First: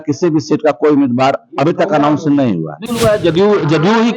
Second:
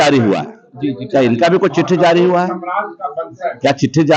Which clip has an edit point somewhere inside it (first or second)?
first